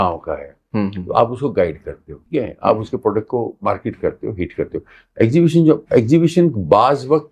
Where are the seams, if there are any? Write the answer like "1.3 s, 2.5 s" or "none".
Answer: 2.2 s, 3.6 s